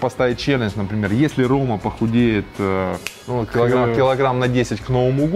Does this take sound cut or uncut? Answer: uncut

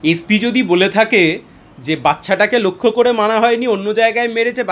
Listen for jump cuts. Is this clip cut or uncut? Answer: uncut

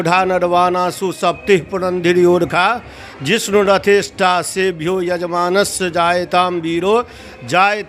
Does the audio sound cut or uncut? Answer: uncut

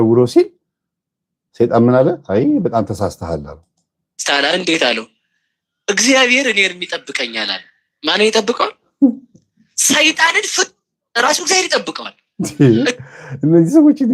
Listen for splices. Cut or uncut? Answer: uncut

